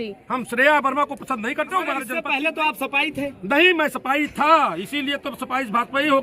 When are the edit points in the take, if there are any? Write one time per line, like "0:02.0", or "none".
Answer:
0:02.1